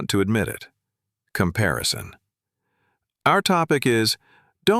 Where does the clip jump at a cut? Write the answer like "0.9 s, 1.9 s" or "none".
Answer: none